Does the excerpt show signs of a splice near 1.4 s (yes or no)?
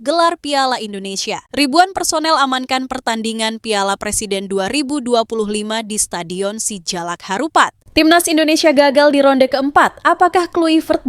yes